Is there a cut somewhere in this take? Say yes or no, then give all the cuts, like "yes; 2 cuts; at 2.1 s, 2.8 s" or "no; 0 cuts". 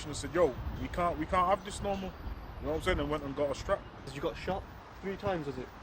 yes; 1 cut; at 4.1 s